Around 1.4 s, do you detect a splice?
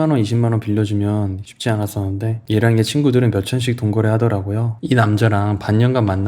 no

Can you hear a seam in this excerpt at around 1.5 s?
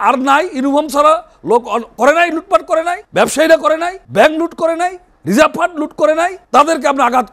no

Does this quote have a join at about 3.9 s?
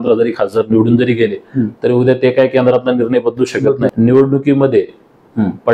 yes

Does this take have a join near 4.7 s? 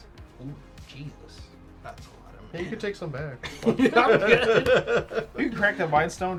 no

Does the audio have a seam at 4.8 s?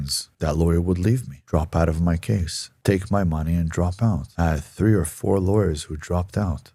no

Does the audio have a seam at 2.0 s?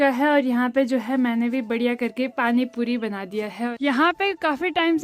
no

